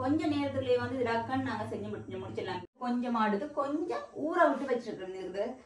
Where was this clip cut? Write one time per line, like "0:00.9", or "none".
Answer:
0:02.7